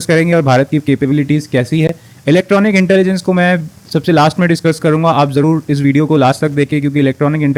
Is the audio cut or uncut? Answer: uncut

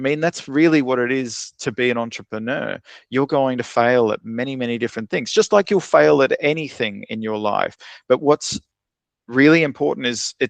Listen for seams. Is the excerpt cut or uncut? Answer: uncut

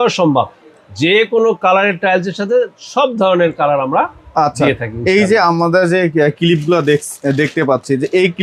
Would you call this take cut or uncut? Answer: uncut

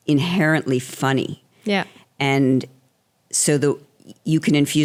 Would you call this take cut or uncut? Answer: uncut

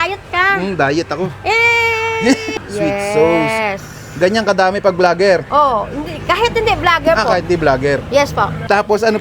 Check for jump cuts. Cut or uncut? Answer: cut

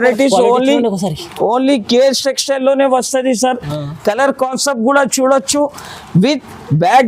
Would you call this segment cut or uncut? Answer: uncut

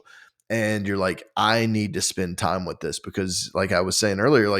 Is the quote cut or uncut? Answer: uncut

